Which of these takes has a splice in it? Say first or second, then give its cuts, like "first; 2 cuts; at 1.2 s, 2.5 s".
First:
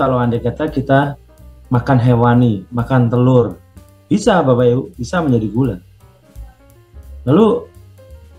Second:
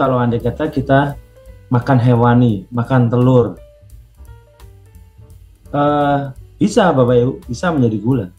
first; 1 cut; at 3.9 s